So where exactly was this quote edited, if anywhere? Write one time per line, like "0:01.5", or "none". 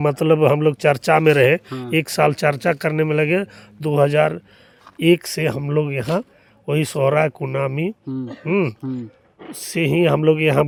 none